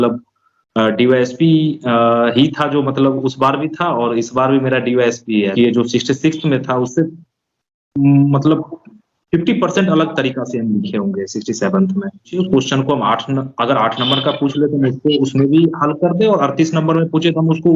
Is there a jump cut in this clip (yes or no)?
yes